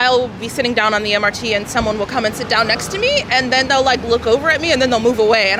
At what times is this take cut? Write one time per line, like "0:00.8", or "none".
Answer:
none